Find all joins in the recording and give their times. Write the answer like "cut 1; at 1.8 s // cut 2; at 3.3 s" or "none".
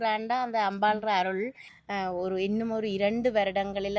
cut 1; at 1.7 s